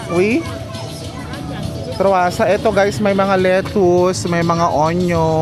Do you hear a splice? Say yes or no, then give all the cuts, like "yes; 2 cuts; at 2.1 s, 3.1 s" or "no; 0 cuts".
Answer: no; 0 cuts